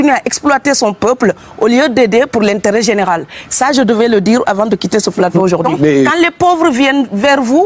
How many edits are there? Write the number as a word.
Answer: one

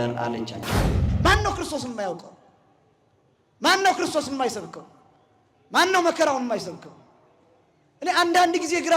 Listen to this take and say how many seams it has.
one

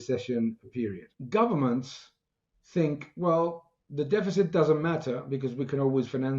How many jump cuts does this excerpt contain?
one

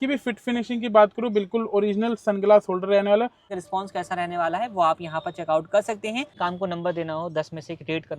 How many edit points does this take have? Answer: two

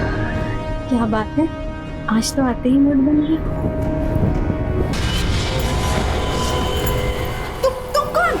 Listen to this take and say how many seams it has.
one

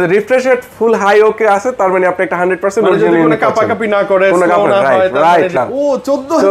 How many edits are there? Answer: one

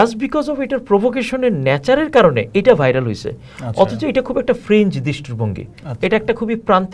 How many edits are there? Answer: zero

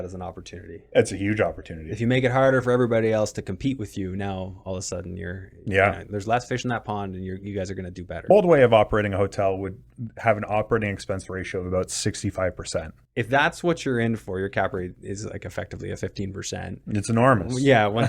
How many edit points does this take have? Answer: two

